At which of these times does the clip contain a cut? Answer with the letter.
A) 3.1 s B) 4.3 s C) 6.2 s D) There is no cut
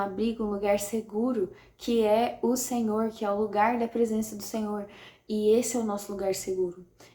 D